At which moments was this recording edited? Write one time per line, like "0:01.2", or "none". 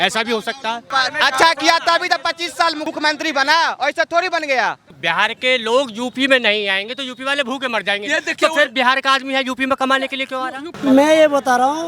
0:00.8
0:02.8
0:04.9
0:10.6